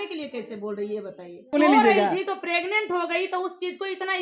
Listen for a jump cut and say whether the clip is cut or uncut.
cut